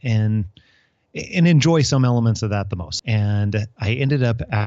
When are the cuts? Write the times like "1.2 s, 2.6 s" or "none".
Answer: 2.8 s